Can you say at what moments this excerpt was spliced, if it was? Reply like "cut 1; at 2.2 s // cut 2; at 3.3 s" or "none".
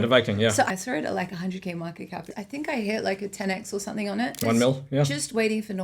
cut 1; at 0.7 s // cut 2; at 2.2 s // cut 3; at 4.4 s